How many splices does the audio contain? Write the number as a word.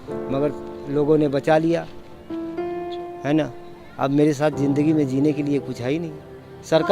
zero